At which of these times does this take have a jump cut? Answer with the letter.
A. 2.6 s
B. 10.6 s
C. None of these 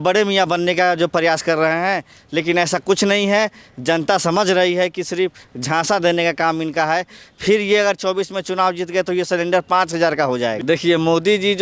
B